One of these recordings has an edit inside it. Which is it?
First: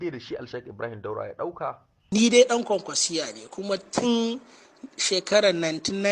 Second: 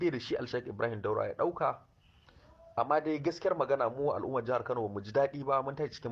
first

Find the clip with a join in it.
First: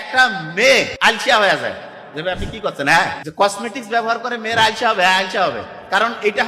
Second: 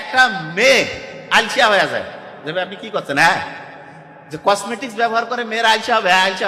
first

